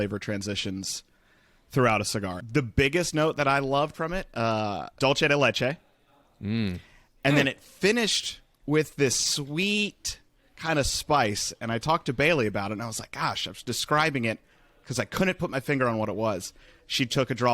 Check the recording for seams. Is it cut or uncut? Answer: cut